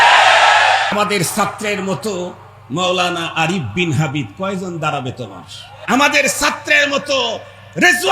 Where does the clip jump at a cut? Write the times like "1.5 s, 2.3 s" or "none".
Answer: 0.9 s, 5.7 s